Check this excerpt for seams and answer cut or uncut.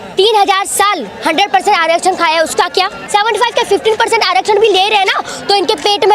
cut